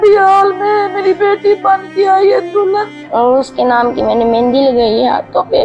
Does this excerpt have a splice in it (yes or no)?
yes